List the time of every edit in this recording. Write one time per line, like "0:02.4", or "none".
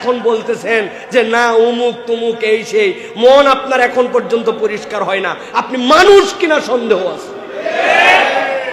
none

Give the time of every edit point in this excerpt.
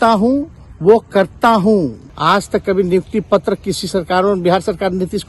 0:02.1

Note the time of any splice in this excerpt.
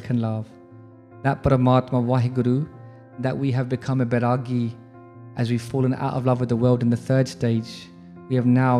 none

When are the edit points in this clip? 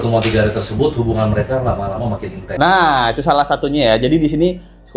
none

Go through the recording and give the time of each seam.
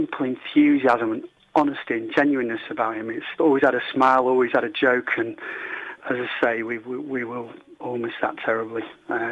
0:03.3
0:06.0

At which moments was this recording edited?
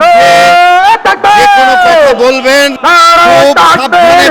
0:02.8

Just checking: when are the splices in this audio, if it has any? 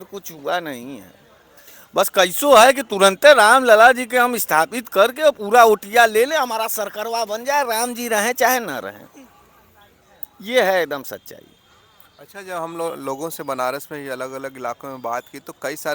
none

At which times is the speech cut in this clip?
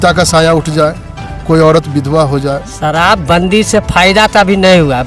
0:02.7

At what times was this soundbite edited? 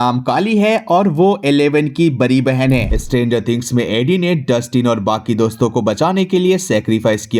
0:02.9

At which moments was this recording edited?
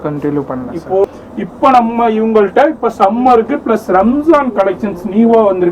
0:01.0

